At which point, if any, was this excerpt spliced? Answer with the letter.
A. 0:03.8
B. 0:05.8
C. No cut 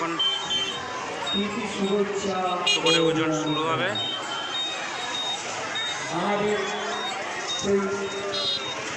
C